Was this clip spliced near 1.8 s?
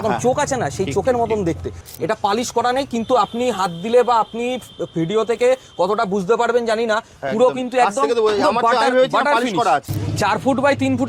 yes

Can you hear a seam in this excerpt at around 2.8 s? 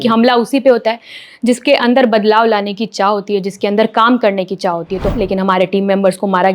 no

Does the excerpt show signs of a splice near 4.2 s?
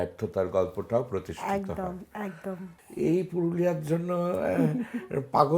no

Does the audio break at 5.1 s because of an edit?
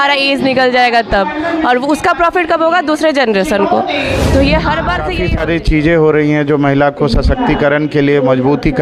yes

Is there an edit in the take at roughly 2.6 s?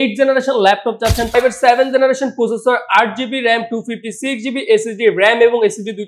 no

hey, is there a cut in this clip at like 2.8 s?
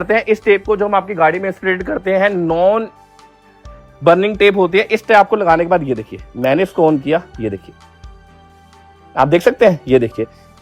no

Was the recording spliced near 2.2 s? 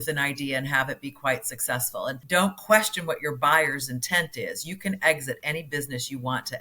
yes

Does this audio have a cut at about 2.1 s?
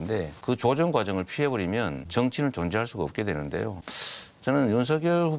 no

